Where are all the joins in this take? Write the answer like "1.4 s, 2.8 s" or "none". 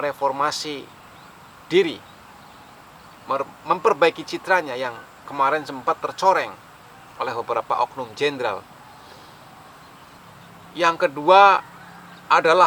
10.2 s